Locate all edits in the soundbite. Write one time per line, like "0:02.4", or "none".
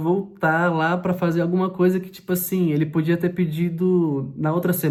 none